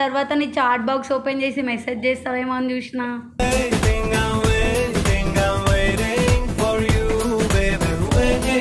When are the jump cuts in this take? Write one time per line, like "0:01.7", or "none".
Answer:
none